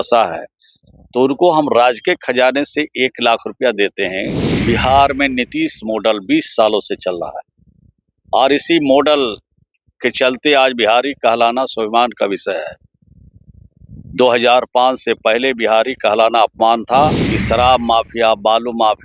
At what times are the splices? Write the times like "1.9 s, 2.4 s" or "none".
4.5 s, 17.3 s